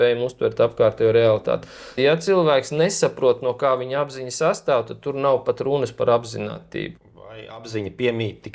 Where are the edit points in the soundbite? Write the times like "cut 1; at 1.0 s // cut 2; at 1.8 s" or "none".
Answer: cut 1; at 1.9 s // cut 2; at 6.9 s

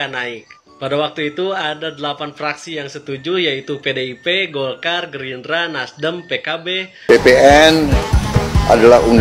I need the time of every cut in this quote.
cut 1; at 7.0 s

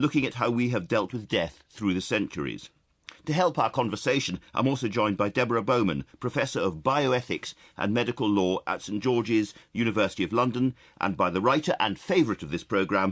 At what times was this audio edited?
none

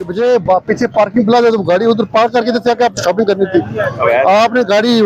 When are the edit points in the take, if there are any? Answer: none

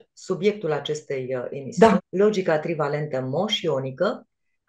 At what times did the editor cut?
cut 1; at 2.0 s

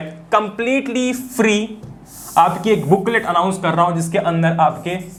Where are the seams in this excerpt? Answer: none

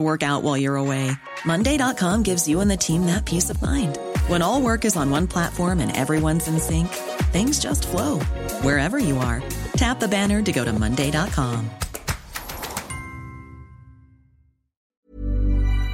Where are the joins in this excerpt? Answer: cut 1; at 14.9 s

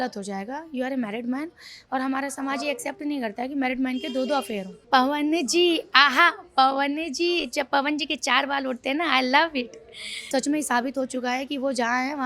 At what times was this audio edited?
cut 1; at 4.7 s // cut 2; at 10.3 s

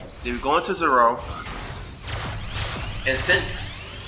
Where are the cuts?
none

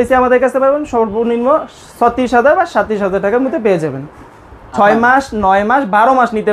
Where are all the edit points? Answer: cut 1; at 4.3 s

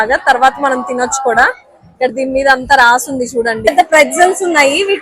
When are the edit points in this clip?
cut 1; at 3.7 s

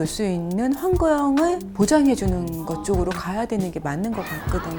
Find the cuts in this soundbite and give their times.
none

